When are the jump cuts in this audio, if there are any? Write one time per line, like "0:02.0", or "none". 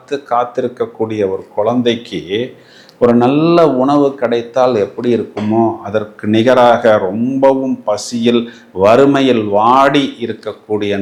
none